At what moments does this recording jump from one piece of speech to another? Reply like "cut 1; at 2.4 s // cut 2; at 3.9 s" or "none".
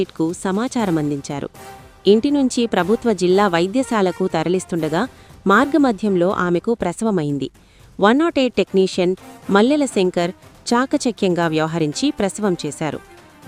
none